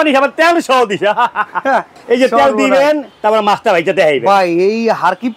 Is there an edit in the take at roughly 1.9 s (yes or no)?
yes